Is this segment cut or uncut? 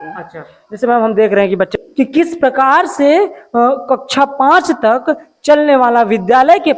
uncut